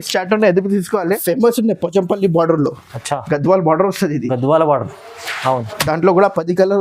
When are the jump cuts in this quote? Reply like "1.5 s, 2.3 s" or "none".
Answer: 1.4 s